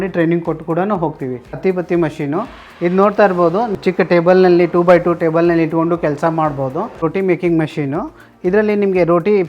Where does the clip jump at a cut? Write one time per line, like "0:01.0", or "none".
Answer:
0:01.6
0:03.7
0:07.0